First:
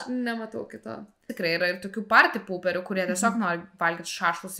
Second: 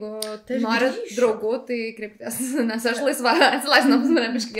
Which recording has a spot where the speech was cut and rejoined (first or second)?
first